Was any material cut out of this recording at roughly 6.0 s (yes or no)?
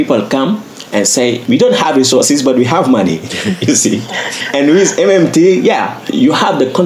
yes